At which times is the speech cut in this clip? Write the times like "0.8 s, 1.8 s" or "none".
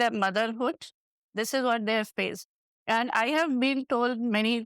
2.7 s